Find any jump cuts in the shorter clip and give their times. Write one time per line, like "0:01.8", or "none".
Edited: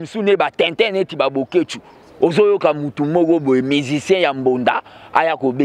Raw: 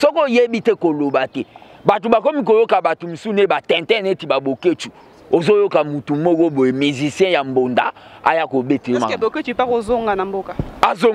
none

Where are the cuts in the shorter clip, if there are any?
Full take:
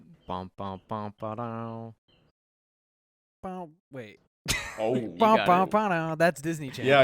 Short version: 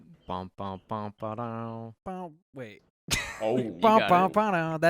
0:02.0

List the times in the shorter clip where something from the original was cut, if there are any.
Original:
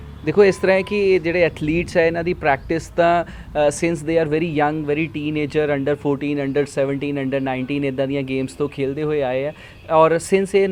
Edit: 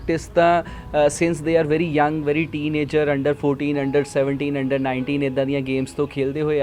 none

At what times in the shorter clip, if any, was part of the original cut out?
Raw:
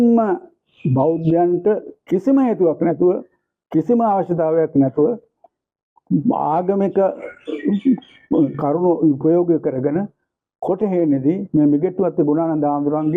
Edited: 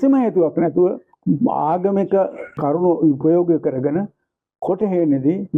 0:01.1
0:02.6

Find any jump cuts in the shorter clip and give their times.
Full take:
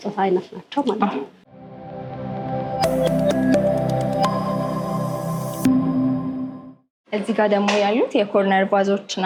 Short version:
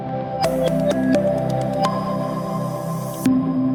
none

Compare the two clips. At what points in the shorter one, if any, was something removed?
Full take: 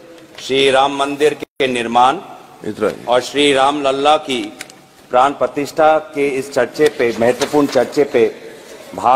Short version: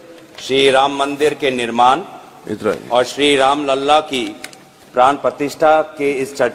0:01.4

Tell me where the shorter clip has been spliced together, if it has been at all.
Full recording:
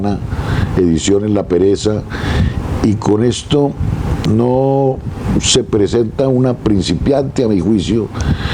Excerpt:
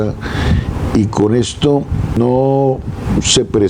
0:02.2

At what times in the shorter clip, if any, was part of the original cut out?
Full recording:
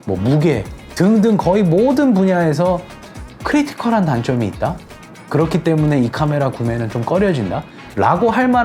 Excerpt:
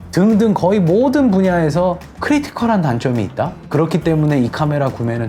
0:02.1
0:03.6

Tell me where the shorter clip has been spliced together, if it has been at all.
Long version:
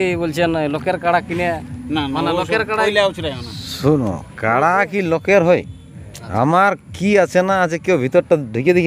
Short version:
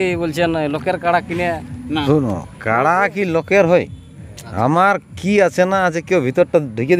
0:02.0

